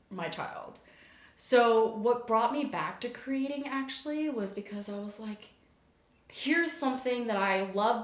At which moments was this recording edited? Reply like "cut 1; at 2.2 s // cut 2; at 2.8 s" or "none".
none